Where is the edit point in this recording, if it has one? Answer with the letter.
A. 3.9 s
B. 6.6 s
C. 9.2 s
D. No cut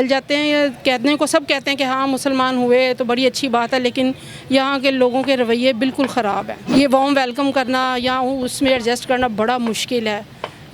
B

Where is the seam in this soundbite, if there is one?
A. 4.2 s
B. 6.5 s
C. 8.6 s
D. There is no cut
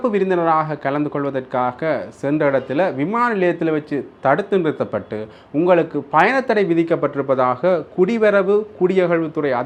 D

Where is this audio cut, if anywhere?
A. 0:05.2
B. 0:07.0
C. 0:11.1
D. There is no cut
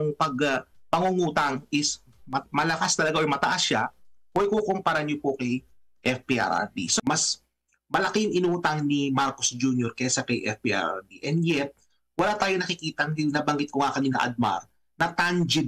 B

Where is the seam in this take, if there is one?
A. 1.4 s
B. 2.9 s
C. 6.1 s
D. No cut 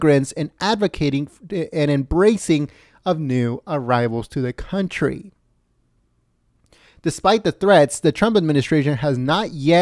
D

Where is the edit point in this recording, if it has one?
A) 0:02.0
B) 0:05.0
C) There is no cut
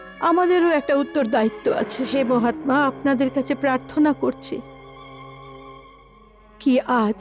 A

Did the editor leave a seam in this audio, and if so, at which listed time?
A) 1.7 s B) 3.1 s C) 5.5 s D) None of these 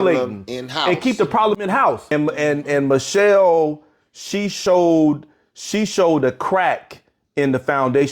A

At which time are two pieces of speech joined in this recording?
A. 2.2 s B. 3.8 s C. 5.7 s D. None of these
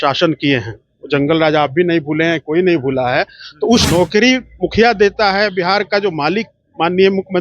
B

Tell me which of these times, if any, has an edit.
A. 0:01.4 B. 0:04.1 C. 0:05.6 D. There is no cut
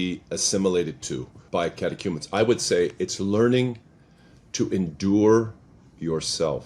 A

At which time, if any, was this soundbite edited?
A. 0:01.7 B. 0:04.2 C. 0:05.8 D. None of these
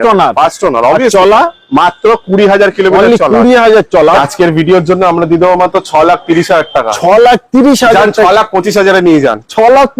B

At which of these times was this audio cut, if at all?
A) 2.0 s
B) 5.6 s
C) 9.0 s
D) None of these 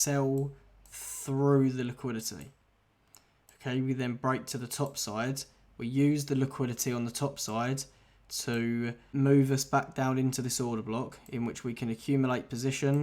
C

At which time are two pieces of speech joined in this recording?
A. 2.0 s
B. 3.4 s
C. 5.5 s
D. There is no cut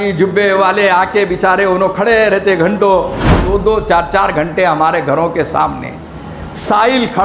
B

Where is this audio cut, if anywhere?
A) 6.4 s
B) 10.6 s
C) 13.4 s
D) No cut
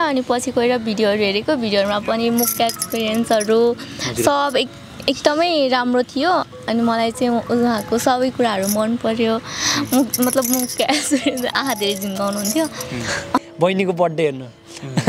C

